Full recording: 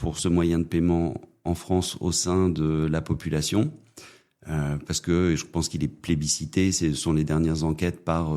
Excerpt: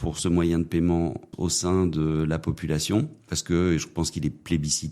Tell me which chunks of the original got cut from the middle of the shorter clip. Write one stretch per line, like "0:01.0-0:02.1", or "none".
0:01.3-0:01.9
0:03.9-0:04.9